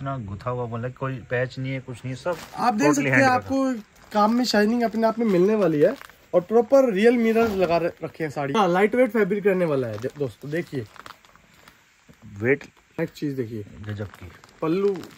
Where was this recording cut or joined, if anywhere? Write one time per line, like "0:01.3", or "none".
0:08.6
0:13.0